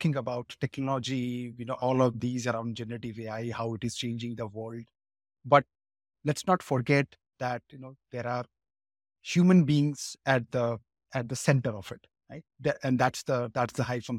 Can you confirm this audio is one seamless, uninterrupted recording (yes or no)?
yes